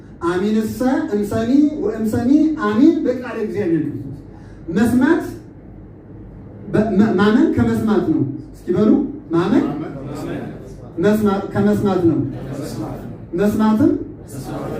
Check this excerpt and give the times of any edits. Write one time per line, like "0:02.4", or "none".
none